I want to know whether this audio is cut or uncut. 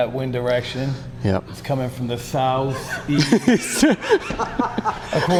uncut